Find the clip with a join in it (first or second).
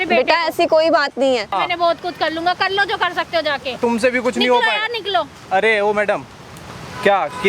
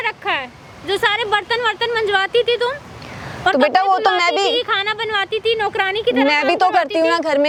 first